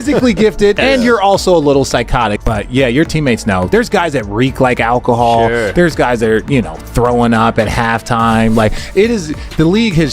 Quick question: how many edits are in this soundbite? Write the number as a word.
one